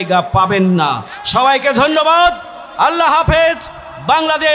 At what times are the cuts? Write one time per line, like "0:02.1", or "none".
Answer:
none

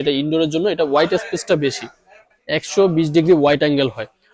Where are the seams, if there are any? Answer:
0:02.3

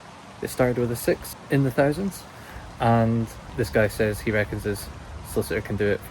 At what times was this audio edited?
0:01.3
0:03.4

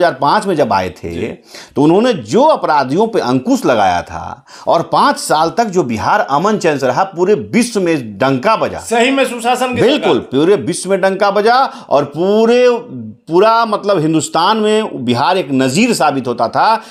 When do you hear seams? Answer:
none

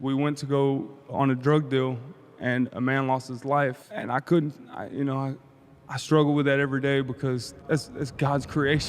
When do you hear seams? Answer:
0:01.1
0:03.9
0:07.5

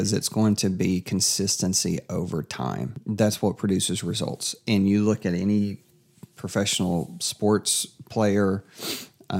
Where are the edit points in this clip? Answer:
0:03.0

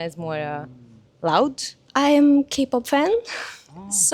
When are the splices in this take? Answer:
0:01.8

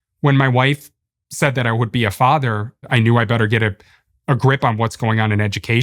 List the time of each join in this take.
0:02.8

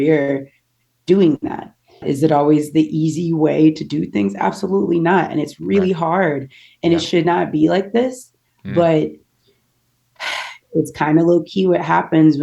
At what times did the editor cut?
0:02.0

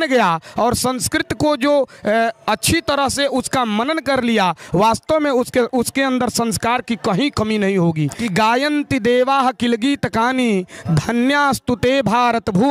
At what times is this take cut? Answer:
0:08.2

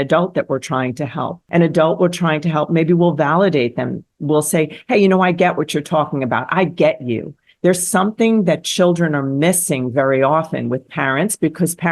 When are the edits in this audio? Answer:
0:01.4

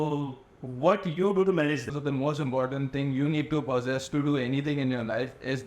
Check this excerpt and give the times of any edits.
0:02.0

